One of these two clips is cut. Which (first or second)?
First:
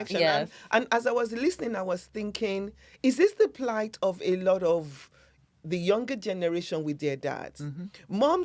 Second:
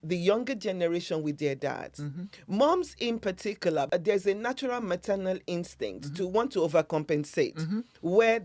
second